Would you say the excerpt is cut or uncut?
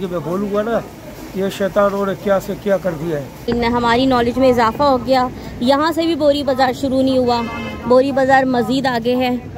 cut